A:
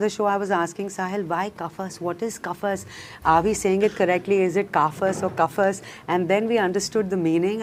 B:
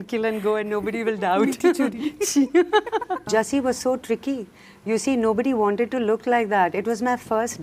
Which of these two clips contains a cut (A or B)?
B